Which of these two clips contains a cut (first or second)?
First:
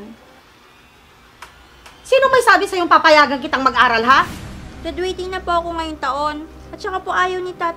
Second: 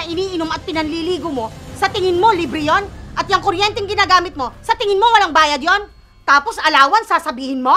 first